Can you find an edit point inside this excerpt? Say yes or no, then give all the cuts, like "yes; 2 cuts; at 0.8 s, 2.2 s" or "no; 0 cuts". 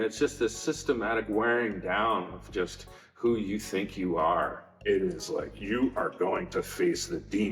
yes; 1 cut; at 4.7 s